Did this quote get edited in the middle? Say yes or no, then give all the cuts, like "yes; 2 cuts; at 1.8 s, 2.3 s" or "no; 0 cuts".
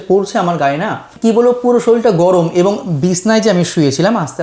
yes; 1 cut; at 1.1 s